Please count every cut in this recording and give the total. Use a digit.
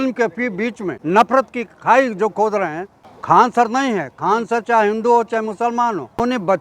3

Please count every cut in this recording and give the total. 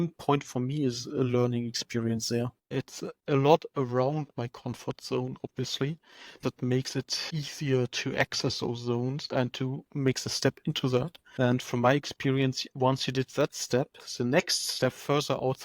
2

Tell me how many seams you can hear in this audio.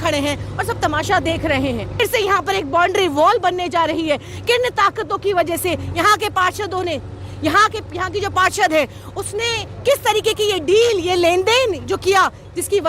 1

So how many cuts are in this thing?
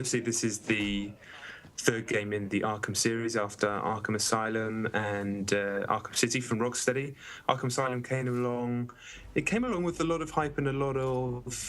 1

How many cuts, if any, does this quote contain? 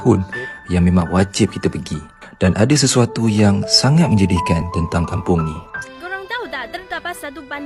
1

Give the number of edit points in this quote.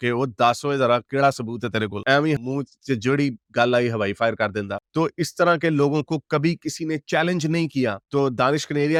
0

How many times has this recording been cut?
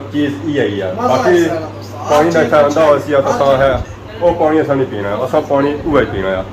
0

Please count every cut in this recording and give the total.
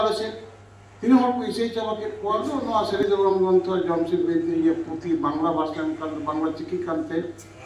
1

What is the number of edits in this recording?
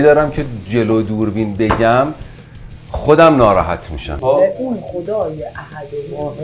1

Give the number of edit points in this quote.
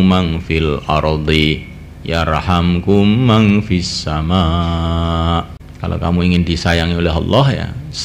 1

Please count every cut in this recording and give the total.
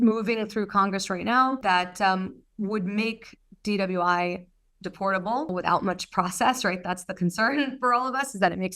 2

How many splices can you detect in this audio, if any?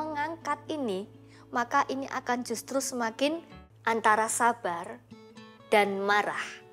1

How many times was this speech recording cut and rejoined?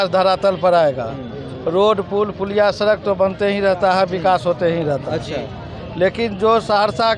0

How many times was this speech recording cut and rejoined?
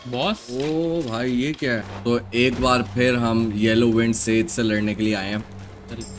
1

